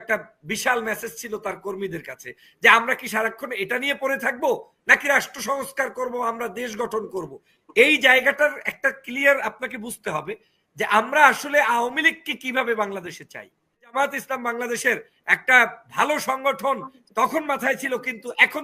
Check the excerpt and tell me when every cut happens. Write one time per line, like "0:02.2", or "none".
0:13.9

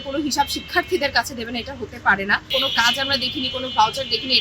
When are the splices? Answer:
0:02.4

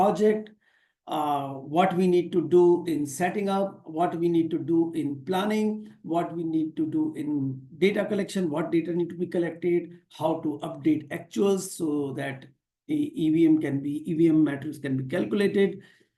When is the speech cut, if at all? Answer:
none

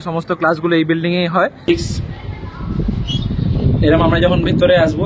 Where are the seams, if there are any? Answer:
0:01.7

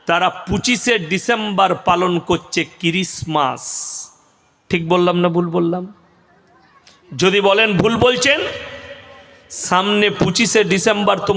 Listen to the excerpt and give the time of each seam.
none

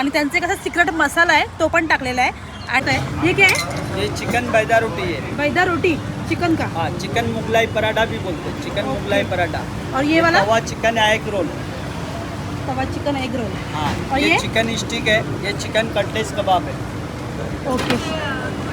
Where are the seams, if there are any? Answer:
0:02.8

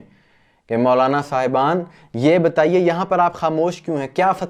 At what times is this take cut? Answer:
none

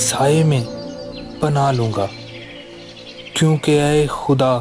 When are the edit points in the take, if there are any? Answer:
none

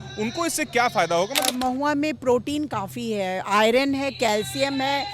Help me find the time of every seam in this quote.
0:01.5

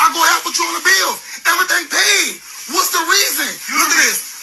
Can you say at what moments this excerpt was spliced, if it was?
0:01.7

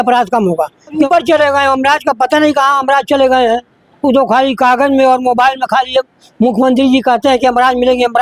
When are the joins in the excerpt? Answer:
0:01.0

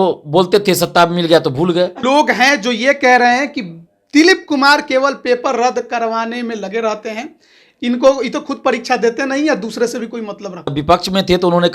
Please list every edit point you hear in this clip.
0:02.0
0:10.7

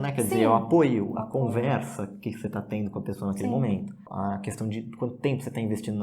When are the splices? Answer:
0:04.0

